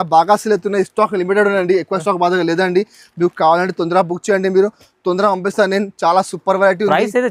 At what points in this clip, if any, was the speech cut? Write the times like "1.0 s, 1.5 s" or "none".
none